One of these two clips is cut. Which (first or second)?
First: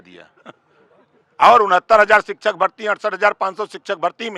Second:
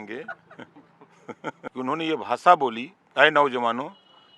second